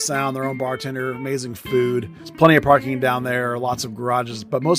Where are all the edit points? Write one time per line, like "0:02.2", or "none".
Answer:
0:02.2